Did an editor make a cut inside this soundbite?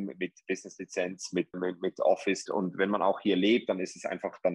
yes; 1 cut; at 2.4 s

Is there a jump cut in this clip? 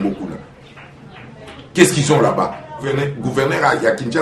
yes; 1 cut; at 2.9 s

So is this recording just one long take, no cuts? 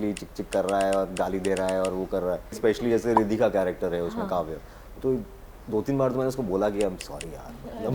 no; 1 cut; at 2.6 s

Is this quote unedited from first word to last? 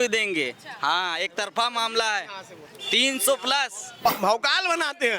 no; 1 cut; at 4.1 s

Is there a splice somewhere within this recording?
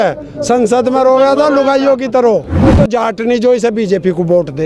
yes; 1 cut; at 2.6 s

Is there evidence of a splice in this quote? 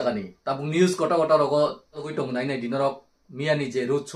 yes; 1 cut; at 2.1 s

